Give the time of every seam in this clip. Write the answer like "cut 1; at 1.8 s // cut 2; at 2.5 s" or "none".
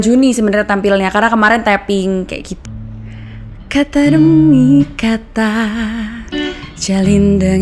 cut 1; at 2.5 s